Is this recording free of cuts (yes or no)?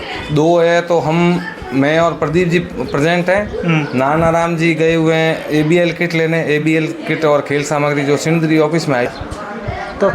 no